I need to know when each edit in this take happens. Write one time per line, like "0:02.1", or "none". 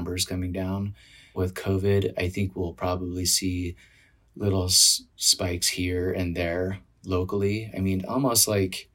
0:01.3